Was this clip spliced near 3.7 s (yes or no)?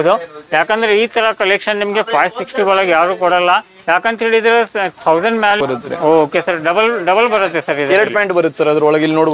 no